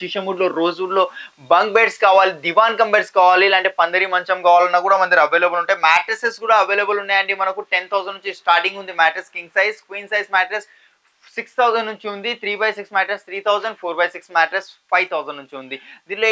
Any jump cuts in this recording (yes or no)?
no